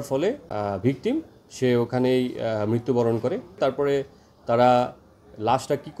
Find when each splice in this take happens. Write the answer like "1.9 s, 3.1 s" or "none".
3.6 s